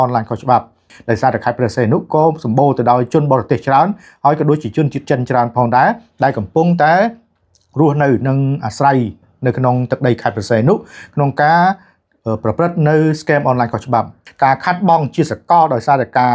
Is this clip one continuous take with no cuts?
no; 2 cuts; at 0.9 s, 14.2 s

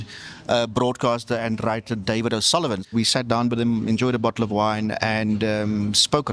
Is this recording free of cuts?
no; 1 cut; at 2.9 s

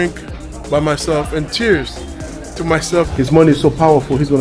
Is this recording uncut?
no; 1 cut; at 3.1 s

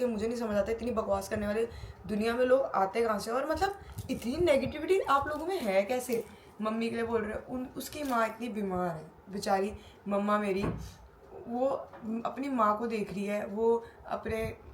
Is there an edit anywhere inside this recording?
no; 0 cuts

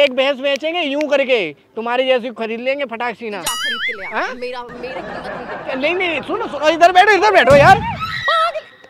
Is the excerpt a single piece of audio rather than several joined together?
yes; 0 cuts

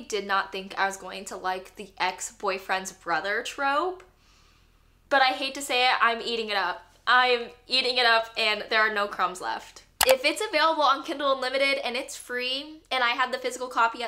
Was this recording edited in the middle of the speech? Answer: yes; 1 cut; at 10.0 s

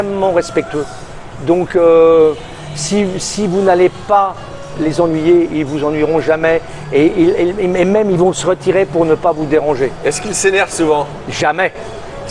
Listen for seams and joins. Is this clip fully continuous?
yes; 0 cuts

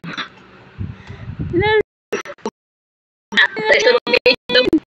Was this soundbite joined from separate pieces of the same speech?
yes; 1 cut; at 1.9 s

